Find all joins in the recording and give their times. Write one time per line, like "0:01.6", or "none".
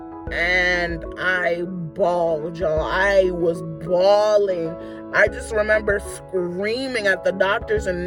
none